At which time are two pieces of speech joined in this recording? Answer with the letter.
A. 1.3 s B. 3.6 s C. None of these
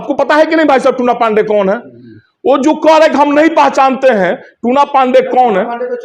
C